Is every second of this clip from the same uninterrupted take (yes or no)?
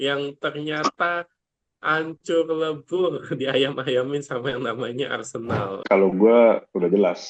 no